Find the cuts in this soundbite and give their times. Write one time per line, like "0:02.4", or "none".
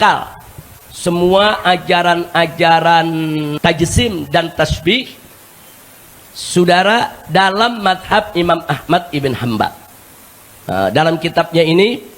0:03.5